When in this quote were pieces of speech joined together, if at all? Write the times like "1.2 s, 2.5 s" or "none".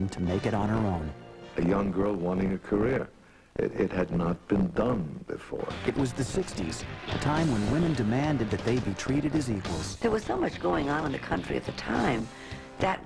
6.7 s